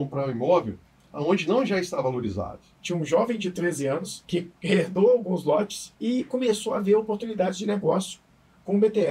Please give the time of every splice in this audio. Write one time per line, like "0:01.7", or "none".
0:02.8
0:04.1
0:05.8